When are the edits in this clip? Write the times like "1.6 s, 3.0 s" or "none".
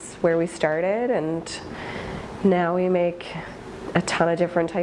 none